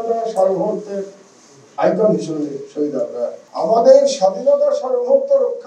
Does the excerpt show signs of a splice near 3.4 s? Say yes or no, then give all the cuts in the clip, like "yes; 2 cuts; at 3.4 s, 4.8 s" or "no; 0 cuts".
yes; 1 cut; at 3.4 s